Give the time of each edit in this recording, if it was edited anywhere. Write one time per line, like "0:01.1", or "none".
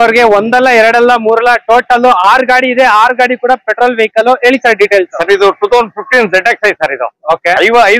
none